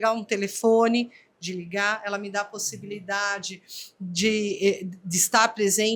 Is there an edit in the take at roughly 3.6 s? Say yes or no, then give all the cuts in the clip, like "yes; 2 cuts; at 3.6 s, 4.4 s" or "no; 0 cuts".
no; 0 cuts